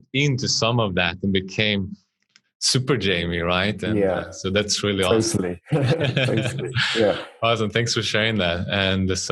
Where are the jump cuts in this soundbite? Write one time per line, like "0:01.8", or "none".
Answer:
none

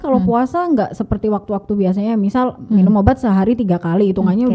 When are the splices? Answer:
none

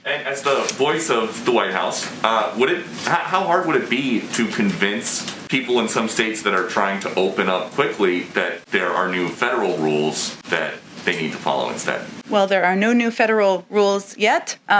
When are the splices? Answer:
none

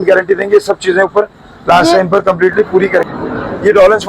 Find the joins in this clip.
0:03.0

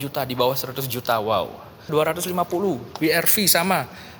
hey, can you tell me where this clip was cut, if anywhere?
0:01.9

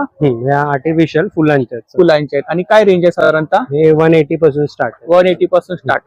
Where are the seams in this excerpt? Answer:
none

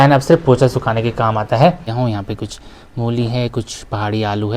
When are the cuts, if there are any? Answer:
0:01.9

